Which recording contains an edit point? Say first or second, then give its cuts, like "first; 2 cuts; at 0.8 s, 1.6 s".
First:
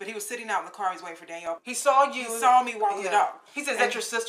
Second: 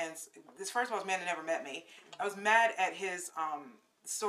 first; 1 cut; at 1.4 s